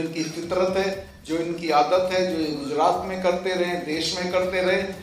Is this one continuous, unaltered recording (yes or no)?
no